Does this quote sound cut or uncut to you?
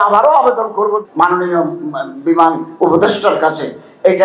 cut